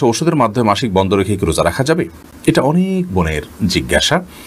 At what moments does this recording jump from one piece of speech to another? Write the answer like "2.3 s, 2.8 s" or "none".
none